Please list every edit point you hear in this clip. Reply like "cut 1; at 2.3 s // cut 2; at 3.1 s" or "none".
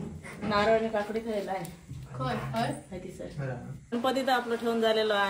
cut 1; at 3.7 s